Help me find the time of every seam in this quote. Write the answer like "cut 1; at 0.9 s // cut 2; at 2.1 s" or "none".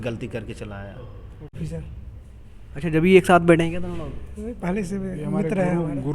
cut 1; at 1.6 s